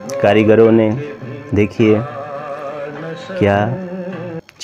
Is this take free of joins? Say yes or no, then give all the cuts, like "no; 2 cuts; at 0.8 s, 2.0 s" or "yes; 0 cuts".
yes; 0 cuts